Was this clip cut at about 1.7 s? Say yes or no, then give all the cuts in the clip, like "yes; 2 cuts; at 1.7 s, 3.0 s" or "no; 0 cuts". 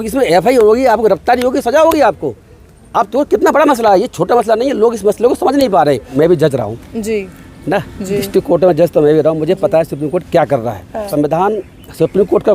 no; 2 cuts; at 6.1 s, 11.1 s